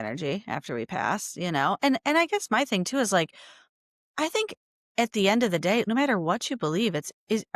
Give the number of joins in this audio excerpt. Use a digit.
1